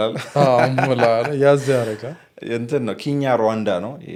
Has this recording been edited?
no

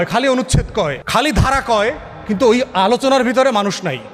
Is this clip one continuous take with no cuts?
no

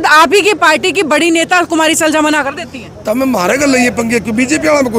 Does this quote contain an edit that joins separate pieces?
no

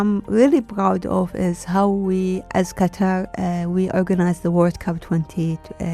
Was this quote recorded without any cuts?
yes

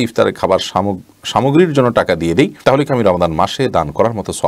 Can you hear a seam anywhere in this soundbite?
no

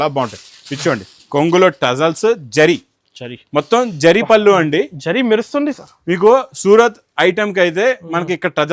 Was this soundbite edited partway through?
no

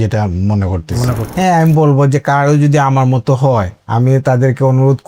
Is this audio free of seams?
no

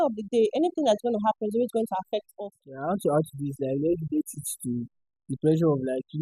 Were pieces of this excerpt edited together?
yes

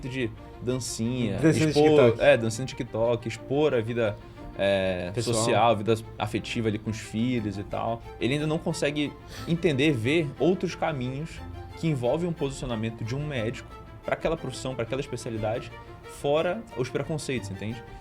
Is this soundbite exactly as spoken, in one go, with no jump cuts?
no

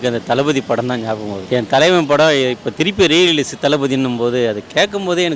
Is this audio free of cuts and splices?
yes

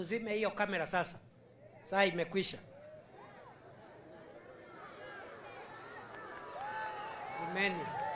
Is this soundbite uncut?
yes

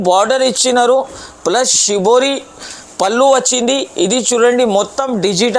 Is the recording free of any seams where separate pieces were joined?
yes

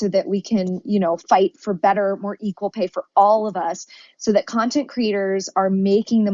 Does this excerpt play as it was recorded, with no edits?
yes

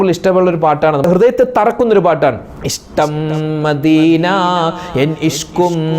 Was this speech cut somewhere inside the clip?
yes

